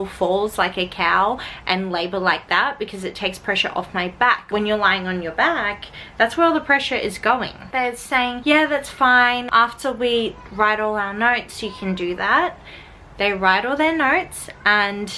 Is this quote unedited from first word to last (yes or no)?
yes